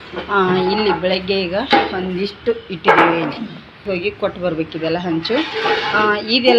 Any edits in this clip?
yes; 1 cut; at 3.8 s

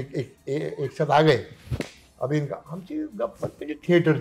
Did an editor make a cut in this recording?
no; 0 cuts

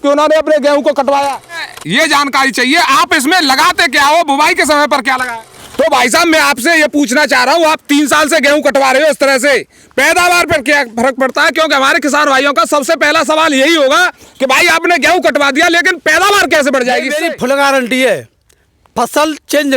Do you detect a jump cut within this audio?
yes; 3 cuts; at 1.6 s, 5.3 s, 17.1 s

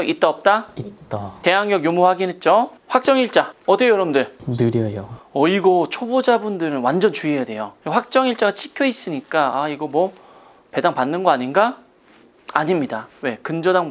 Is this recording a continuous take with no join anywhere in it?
no; 1 cut; at 1.2 s

